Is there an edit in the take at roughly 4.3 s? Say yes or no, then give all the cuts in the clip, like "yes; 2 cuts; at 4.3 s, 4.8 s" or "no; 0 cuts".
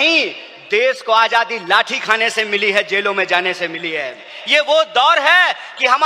yes; 1 cut; at 4.3 s